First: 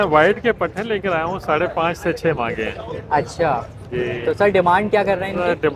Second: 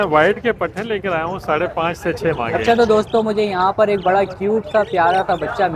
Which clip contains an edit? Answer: second; 1 cut; at 2.5 s

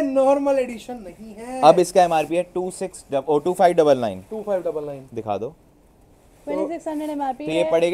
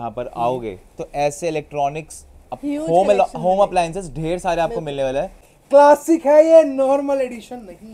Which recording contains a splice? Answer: second; 1 cut; at 5.5 s

